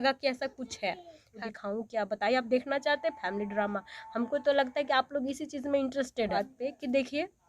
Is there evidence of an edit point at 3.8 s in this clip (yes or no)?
no